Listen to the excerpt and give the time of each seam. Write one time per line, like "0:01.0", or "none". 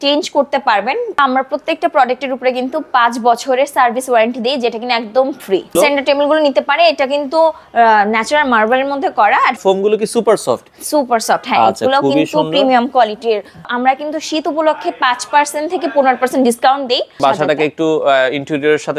0:01.2
0:05.7
0:09.6
0:13.7
0:17.2